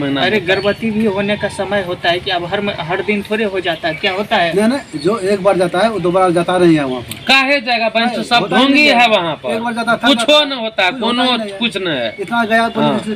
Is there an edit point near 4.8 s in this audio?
no; 0 cuts

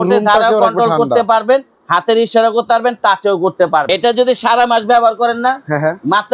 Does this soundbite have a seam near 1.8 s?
no; 1 cut; at 3.9 s

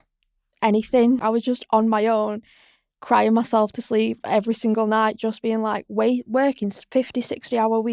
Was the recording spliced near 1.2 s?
yes; 1 cut; at 1.2 s

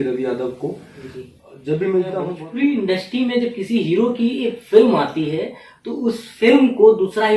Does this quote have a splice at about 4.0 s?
no; 1 cut; at 2.4 s

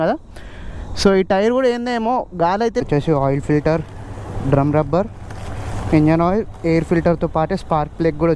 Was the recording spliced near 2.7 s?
yes; 1 cut; at 2.7 s

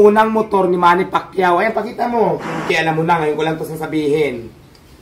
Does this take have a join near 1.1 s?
no; 1 cut; at 2.6 s

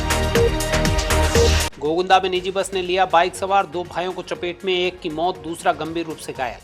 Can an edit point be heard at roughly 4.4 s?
no; 1 cut; at 1.7 s

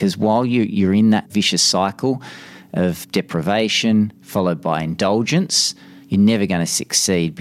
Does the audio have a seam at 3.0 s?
yes; 2 cuts; at 1.3 s, 3.0 s

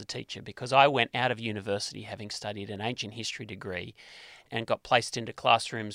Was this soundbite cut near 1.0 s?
no; 1 cut; at 4.4 s

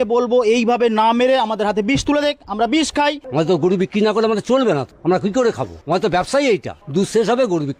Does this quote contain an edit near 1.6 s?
no; 4 cuts; at 3.2 s, 4.9 s, 5.7 s, 6.8 s

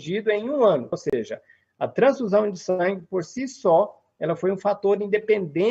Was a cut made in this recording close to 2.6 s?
no; 1 cut; at 0.9 s

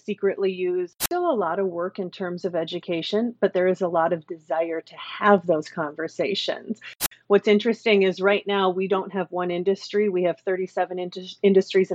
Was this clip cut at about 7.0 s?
yes; 2 cuts; at 0.9 s, 7.0 s

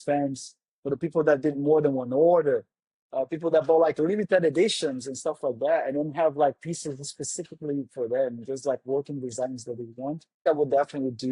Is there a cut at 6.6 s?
no; 1 cut; at 10.4 s

